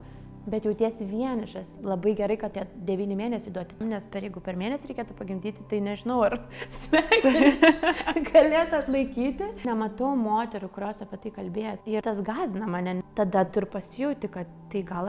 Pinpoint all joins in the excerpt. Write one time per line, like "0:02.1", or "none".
0:01.6
0:03.8
0:09.7
0:11.9
0:13.1